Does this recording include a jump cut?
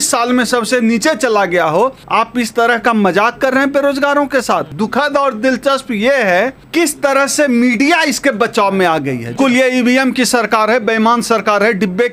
yes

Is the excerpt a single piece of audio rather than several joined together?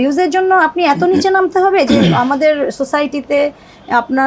yes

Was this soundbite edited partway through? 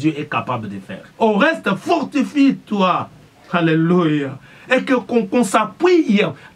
yes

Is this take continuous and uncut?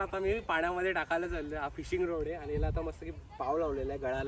yes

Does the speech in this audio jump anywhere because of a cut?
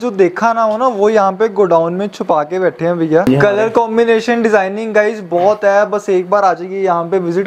yes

